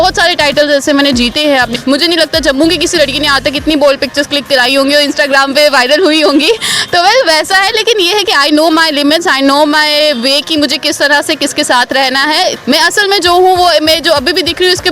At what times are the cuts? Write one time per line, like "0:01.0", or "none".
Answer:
0:01.7
0:12.6